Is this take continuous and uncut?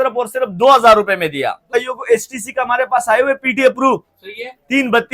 no; 1 cut; at 1.7 s

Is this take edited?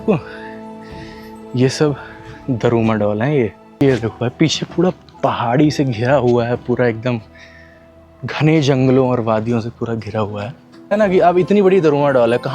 yes; 2 cuts; at 3.8 s, 10.9 s

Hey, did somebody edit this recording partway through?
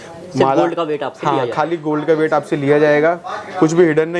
no; 0 cuts

